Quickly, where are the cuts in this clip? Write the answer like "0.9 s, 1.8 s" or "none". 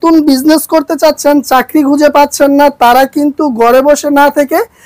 none